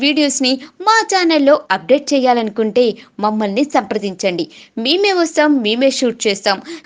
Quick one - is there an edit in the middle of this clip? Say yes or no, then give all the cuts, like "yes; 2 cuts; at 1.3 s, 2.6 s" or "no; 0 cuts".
no; 0 cuts